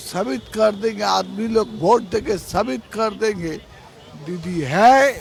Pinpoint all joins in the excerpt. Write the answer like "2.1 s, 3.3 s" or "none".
none